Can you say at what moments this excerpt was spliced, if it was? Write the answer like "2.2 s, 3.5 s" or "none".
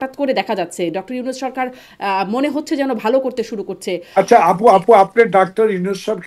none